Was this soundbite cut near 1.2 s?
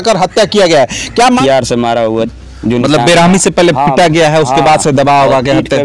yes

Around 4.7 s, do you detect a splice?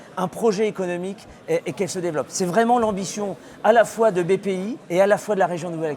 yes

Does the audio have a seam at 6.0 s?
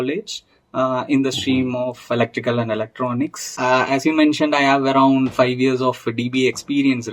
no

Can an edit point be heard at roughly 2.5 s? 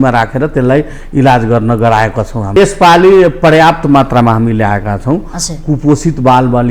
yes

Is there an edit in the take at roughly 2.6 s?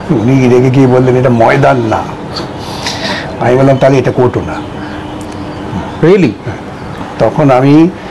no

